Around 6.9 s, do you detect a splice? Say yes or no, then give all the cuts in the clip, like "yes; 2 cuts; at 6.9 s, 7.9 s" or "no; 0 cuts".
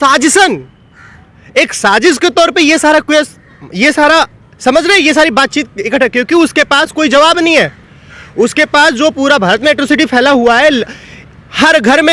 no; 0 cuts